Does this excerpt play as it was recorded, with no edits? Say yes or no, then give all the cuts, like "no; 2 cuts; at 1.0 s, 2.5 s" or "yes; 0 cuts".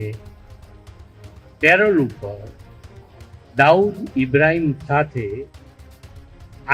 yes; 0 cuts